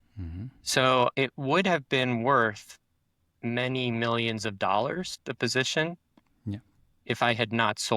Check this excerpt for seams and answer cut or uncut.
cut